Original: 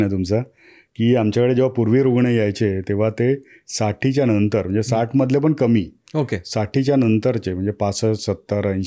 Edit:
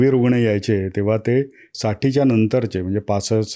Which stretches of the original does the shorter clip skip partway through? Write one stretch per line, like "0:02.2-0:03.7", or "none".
0:03.6-0:06.4